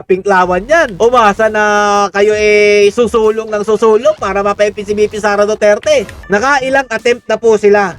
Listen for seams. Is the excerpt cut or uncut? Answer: cut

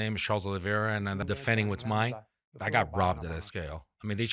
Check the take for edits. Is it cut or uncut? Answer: uncut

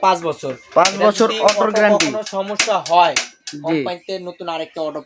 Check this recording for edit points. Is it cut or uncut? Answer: uncut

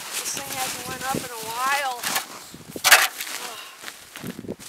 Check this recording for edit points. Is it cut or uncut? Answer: uncut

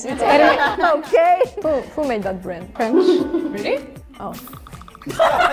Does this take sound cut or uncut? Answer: cut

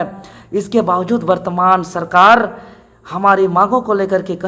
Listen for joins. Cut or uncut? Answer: uncut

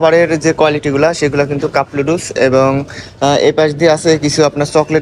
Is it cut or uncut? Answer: uncut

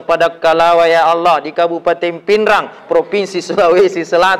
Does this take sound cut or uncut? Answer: uncut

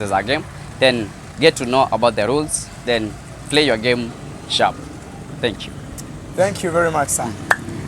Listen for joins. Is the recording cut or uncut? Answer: uncut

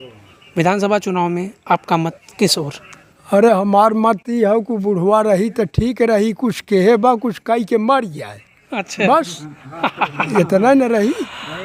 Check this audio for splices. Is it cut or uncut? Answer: uncut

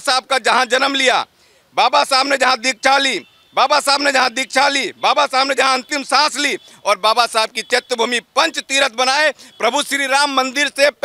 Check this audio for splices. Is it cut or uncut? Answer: uncut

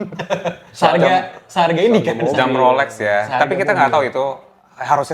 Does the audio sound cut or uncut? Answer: uncut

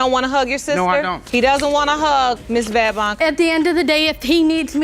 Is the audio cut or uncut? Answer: uncut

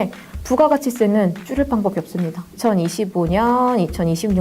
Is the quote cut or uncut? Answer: cut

